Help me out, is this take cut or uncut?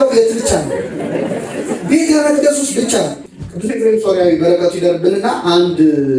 cut